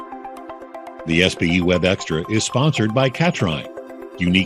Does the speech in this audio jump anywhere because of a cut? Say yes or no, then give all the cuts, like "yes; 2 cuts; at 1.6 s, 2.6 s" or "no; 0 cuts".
yes; 1 cut; at 1.1 s